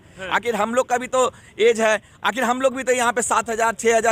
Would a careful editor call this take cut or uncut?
uncut